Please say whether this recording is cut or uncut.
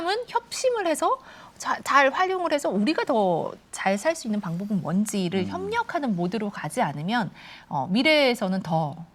uncut